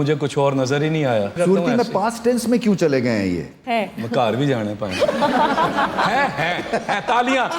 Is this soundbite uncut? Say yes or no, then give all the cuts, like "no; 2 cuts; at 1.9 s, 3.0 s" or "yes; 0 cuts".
no; 2 cuts; at 1.3 s, 3.5 s